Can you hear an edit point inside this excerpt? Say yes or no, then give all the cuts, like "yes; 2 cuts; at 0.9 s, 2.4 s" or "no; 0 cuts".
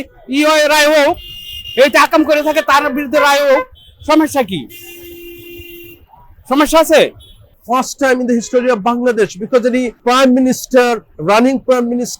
yes; 2 cuts; at 7.4 s, 9.9 s